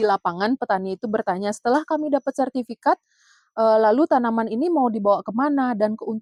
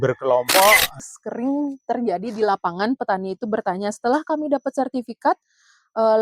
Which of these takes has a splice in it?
second; 1 cut; at 1.1 s

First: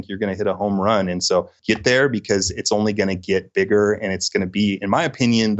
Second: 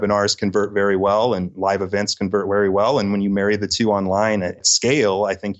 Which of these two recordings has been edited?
first; 1 cut; at 1.5 s

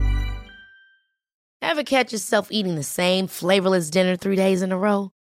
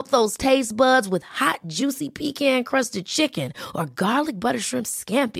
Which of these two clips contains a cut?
first; 1 cut; at 1.5 s

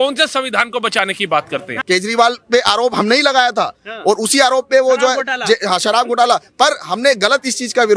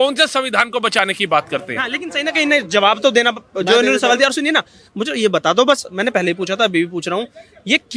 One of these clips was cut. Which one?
first; 1 cut; at 1.8 s

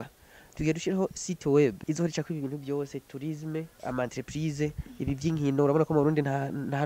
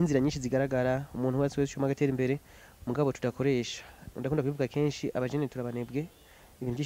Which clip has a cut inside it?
first; 2 cuts; at 1.8 s, 3.7 s

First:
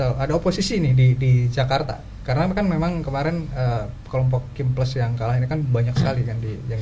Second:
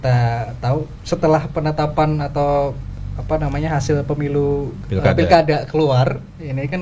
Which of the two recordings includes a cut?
second; 2 cuts; at 1.0 s, 4.8 s

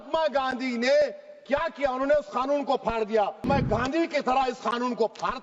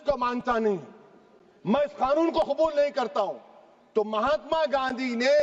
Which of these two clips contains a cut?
first; 1 cut; at 3.5 s

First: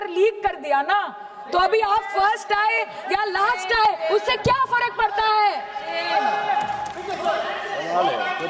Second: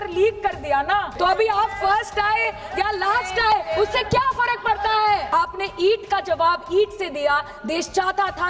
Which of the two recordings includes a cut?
second; 2 cuts; at 1.1 s, 5.3 s

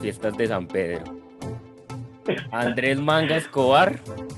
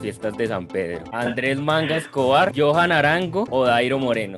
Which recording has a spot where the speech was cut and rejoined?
second; 3 cuts; at 1.1 s, 2.5 s, 3.5 s

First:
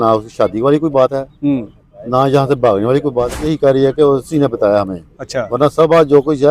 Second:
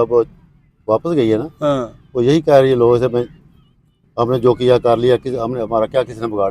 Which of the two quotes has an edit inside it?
first; 1 cut; at 3.5 s

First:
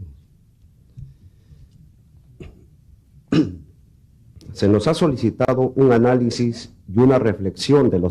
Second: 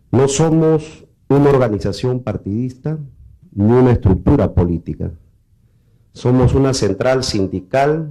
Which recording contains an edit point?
first; 1 cut; at 2.3 s

